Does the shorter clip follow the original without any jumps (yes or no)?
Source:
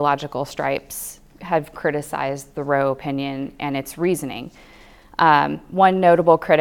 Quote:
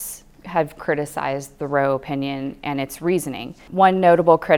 no